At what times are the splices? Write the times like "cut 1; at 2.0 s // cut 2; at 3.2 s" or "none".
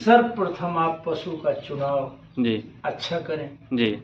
none